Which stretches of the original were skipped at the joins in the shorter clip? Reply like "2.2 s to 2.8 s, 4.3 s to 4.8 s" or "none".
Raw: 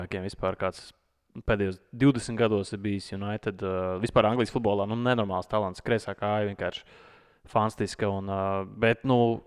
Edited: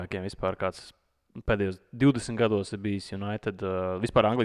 none